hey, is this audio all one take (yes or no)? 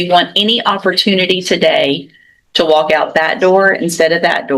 yes